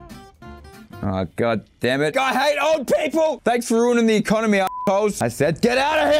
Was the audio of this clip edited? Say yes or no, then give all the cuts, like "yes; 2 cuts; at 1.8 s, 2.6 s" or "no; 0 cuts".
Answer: yes; 1 cut; at 2.1 s